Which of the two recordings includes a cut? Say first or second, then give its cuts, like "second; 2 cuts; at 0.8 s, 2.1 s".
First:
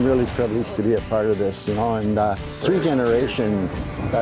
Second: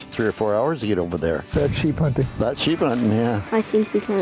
second; 2 cuts; at 1.5 s, 3.4 s